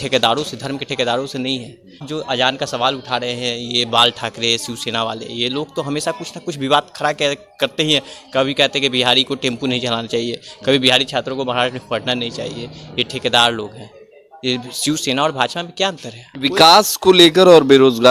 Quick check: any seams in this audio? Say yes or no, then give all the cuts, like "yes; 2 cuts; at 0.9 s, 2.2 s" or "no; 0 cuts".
yes; 1 cut; at 2.1 s